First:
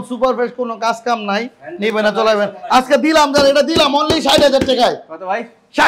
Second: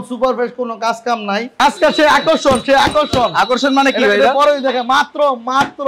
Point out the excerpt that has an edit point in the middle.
second; 1 cut; at 1.5 s

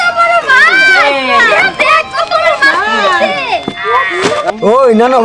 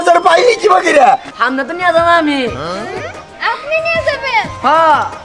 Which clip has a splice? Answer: second; 1 cut; at 1.3 s

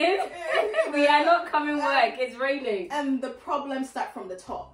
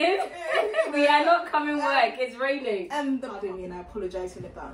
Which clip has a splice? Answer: second; 1 cut; at 3.3 s

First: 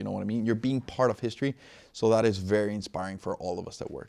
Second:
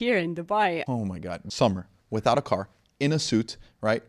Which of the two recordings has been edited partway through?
second; 1 cut; at 0.9 s

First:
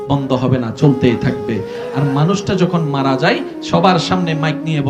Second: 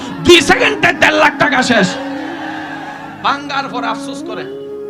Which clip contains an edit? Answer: second; 1 cut; at 3.9 s

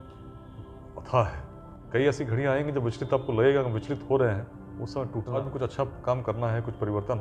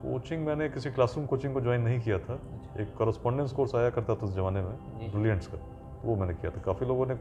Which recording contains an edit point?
first; 2 cuts; at 1.7 s, 5.4 s

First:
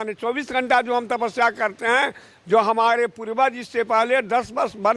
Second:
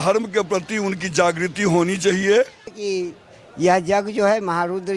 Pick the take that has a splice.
second; 1 cut; at 2.8 s

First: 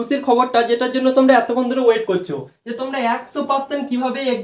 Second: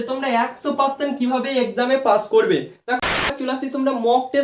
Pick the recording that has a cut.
second; 1 cut; at 3.0 s

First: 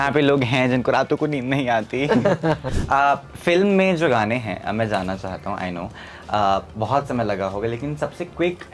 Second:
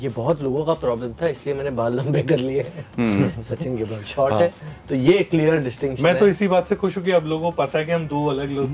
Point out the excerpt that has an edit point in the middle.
first; 1 cut; at 2.7 s

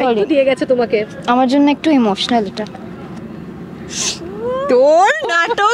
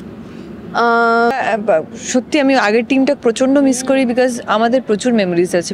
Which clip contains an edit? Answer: second; 1 cut; at 1.4 s

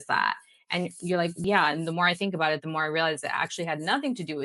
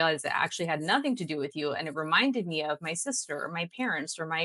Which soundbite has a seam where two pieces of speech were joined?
first; 1 cut; at 1.4 s

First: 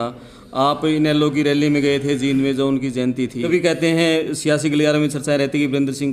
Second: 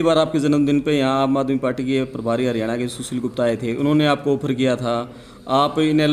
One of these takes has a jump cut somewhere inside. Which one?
first; 1 cut; at 3.4 s

